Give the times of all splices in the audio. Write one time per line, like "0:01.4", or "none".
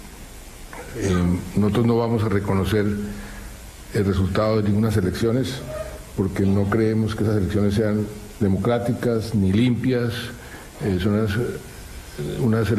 0:09.0